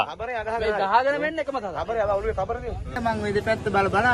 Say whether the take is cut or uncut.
cut